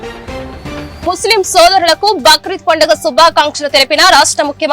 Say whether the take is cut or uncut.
cut